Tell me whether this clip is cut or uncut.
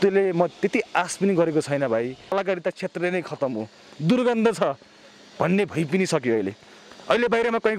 cut